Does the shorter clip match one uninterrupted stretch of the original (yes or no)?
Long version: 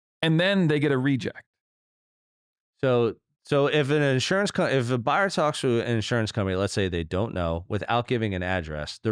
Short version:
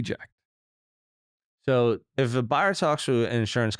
no